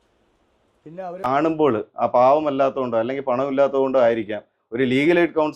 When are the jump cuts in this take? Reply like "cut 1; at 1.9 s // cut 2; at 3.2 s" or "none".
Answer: cut 1; at 1.3 s